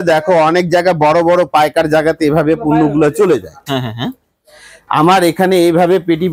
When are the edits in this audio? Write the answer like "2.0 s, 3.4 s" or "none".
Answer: none